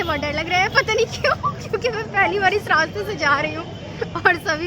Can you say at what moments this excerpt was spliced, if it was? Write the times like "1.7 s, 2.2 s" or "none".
none

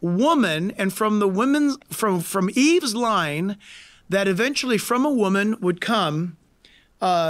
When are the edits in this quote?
none

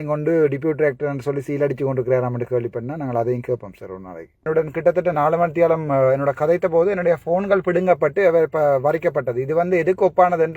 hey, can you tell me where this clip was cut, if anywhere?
4.4 s

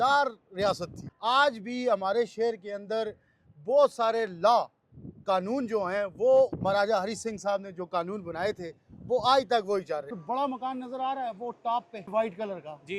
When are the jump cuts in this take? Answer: 1.0 s, 6.6 s, 10.1 s, 12.1 s

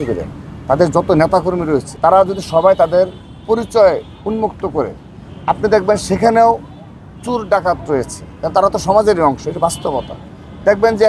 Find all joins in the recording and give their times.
1.9 s

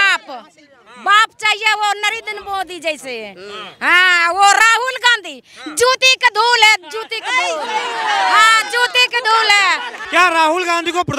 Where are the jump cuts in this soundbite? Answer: 10.0 s

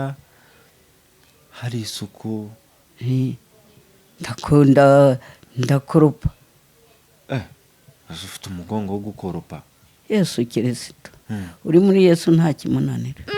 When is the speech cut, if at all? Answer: none

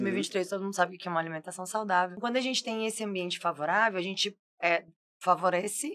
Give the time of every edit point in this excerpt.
2.1 s

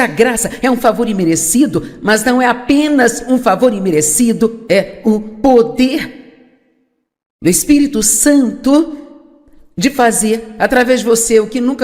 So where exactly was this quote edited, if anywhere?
2.6 s

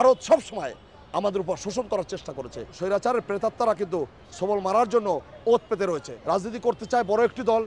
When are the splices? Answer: 2.8 s, 6.1 s

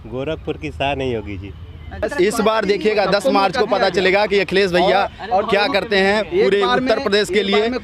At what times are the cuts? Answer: 2.0 s

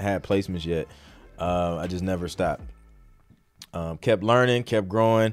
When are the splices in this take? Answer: none

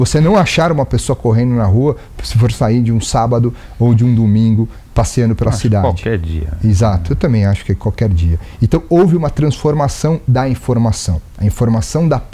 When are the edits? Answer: none

